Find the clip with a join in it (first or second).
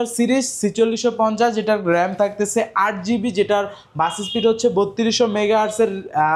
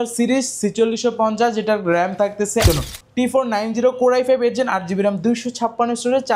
second